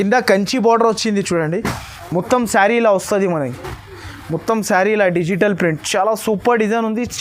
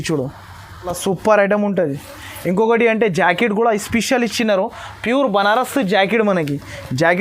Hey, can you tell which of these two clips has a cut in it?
second; 1 cut; at 1.0 s

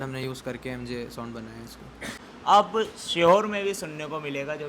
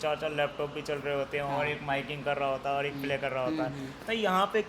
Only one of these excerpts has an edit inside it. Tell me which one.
first; 1 cut; at 2.2 s

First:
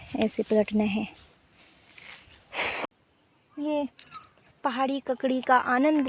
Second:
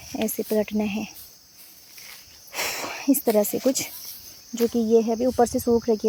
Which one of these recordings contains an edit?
first; 1 cut; at 2.9 s

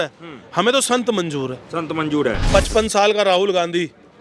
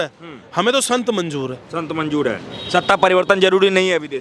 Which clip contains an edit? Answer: first; 1 cut; at 2.4 s

